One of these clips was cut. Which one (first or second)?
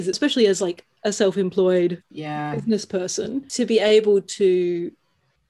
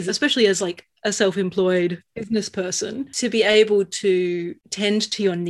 second